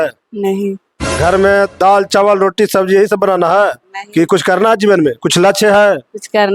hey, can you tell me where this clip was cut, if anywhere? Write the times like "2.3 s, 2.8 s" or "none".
1.1 s